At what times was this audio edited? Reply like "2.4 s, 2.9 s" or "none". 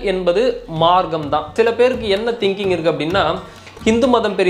1.5 s